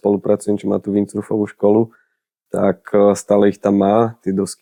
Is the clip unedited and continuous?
yes; 0 cuts

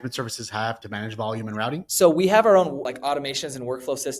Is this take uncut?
no; 3 cuts; at 0.8 s, 1.9 s, 2.9 s

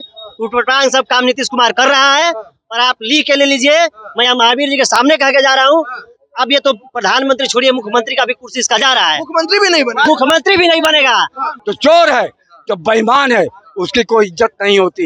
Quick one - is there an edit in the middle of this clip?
yes; 1 cut; at 11.5 s

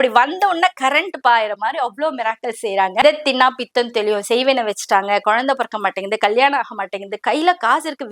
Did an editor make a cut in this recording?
yes; 1 cut; at 3.0 s

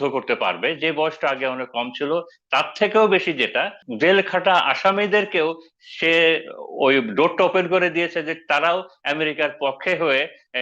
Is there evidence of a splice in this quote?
yes; 1 cut; at 3.8 s

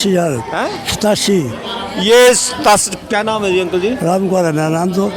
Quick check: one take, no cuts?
yes; 0 cuts

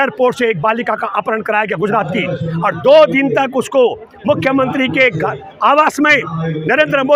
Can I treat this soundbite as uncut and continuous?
yes; 0 cuts

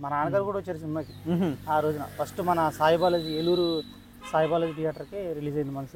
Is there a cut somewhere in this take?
no; 0 cuts

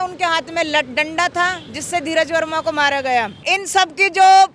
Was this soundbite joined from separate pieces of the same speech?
yes; 1 cut; at 3.4 s

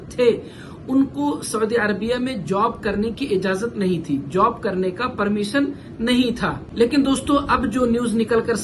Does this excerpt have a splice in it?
no; 0 cuts

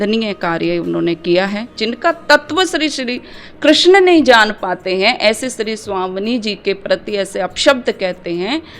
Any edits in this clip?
yes; 1 cut; at 1.8 s

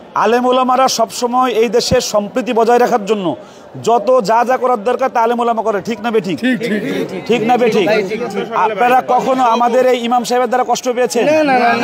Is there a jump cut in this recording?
no; 0 cuts

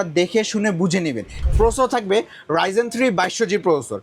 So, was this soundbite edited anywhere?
yes; 1 cut; at 1.3 s

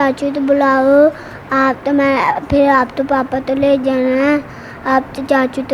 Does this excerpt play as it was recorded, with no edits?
yes; 0 cuts

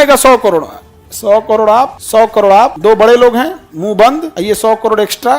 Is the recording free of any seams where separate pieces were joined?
no; 3 cuts; at 2.0 s, 2.8 s, 4.3 s

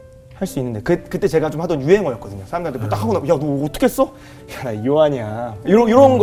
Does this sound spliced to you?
no; 0 cuts

